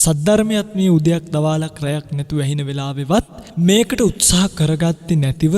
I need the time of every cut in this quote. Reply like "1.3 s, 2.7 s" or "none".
3.4 s